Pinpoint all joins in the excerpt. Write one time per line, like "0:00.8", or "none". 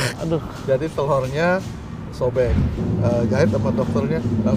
0:02.7

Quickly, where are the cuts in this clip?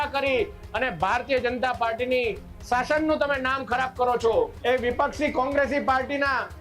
0:04.6

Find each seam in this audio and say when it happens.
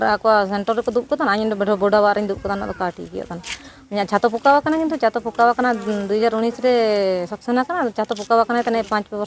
none

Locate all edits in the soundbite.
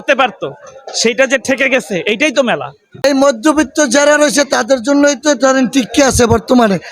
0:02.8

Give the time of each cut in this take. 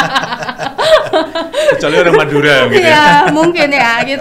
none

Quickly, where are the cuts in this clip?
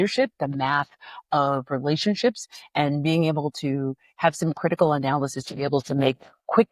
none

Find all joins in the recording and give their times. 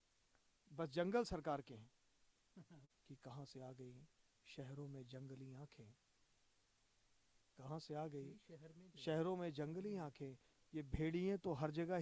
0:02.8

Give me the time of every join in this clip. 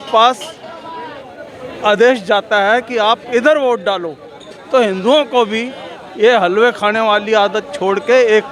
none

